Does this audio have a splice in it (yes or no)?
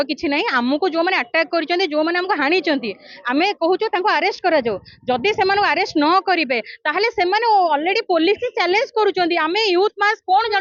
no